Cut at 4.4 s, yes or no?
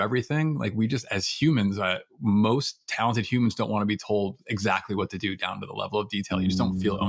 no